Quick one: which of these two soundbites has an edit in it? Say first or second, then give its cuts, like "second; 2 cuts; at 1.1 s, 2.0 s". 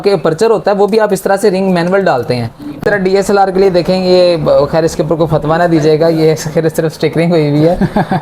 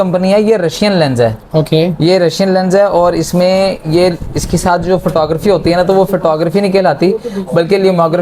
first; 1 cut; at 2.8 s